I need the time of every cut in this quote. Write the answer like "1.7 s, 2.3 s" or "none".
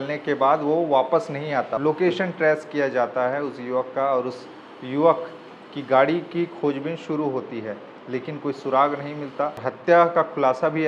1.7 s, 9.7 s